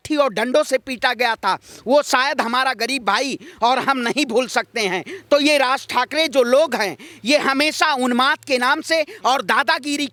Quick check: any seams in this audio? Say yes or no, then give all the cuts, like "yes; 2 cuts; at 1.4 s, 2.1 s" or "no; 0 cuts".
no; 0 cuts